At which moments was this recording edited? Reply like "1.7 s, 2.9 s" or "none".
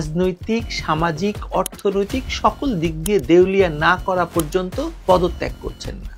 none